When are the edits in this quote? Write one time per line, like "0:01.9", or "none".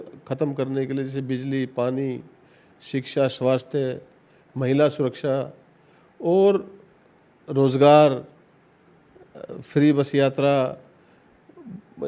none